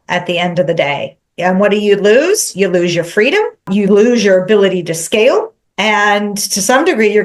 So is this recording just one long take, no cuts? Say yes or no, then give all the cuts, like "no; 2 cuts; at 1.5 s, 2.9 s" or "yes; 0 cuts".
no; 2 cuts; at 3.7 s, 5.6 s